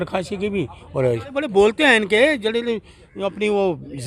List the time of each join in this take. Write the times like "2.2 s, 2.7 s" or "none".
1.4 s

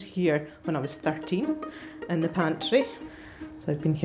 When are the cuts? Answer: 2.9 s

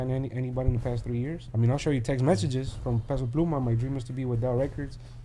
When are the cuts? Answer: 1.4 s

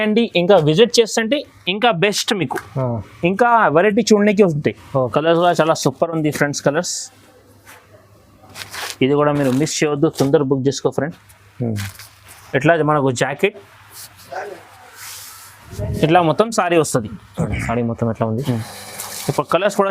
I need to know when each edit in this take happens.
5.1 s, 12.1 s

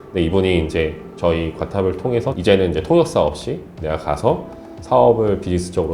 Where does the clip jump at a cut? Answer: 2.3 s

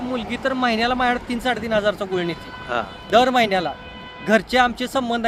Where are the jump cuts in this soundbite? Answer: none

